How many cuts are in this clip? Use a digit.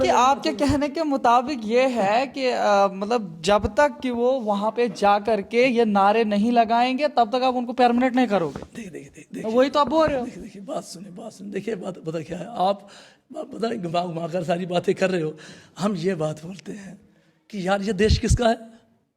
0